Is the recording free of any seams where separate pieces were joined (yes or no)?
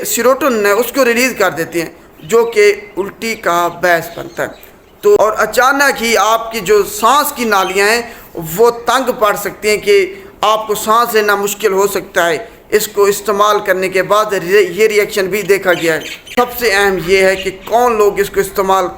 no